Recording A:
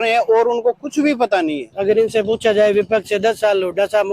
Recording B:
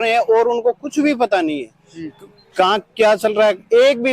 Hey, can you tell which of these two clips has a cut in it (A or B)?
A